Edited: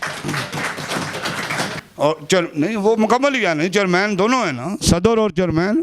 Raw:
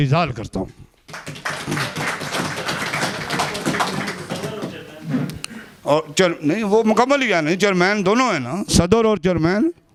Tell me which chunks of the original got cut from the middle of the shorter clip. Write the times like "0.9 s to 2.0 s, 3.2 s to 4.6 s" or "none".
3.2 s to 5.7 s